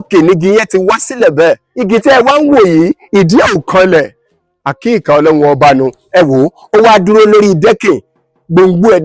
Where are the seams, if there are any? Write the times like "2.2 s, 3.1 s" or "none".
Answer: none